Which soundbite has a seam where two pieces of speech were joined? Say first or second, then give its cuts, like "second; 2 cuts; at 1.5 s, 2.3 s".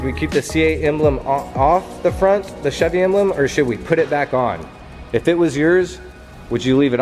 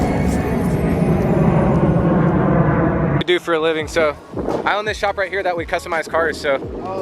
second; 1 cut; at 3.2 s